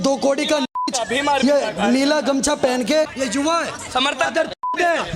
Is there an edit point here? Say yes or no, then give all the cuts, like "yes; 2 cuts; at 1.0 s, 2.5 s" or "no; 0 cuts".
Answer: yes; 1 cut; at 3.1 s